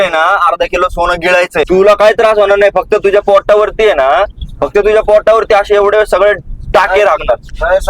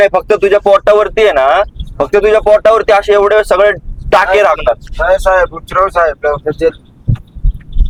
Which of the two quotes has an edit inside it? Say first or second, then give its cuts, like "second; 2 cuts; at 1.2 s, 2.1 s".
first; 1 cut; at 1.7 s